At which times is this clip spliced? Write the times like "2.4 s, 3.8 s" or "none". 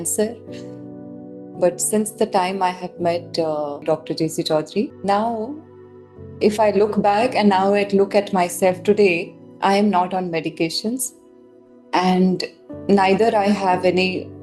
5.0 s